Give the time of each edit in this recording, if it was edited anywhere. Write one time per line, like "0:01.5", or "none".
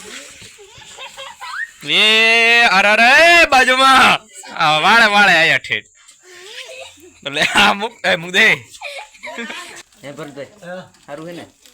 0:09.8